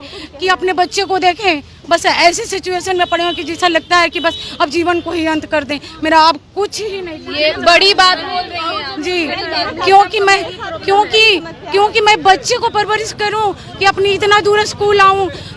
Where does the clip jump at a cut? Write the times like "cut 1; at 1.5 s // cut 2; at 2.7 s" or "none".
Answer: none